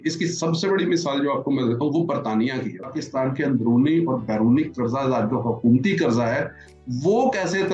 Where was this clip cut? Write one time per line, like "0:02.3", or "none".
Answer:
0:02.9